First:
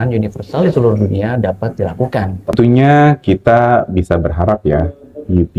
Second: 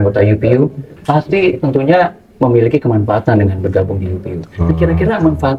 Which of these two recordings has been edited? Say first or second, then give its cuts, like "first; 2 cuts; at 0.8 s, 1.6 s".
first; 1 cut; at 2.5 s